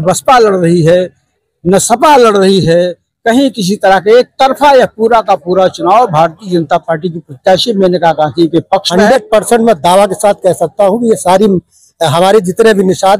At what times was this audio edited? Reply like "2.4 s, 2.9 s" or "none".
8.9 s